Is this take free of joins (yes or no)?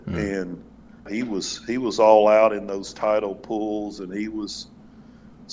no